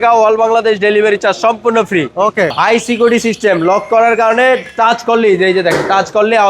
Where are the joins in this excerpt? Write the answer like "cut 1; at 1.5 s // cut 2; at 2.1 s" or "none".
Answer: cut 1; at 2.5 s